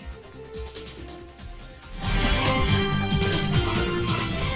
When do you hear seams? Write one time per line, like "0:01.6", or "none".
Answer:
0:01.3
0:02.6

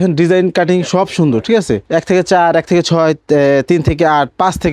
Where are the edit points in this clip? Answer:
0:01.8

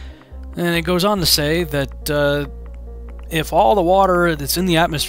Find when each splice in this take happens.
0:01.0

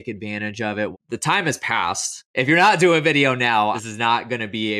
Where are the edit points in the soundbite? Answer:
0:00.9
0:02.1
0:03.8

